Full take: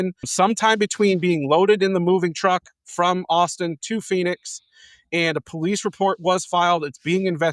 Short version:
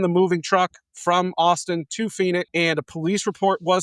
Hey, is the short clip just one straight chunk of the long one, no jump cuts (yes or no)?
no